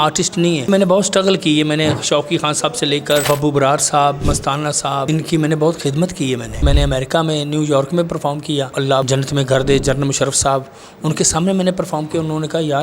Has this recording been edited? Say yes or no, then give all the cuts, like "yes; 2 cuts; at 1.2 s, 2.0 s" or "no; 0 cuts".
yes; 5 cuts; at 0.7 s, 3.2 s, 5.0 s, 6.6 s, 8.9 s